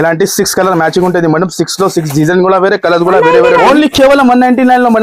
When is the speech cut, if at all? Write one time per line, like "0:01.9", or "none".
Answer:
0:03.2